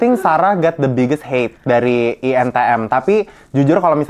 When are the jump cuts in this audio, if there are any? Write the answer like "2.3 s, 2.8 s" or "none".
none